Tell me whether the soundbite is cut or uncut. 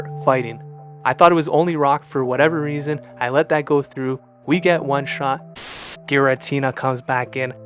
cut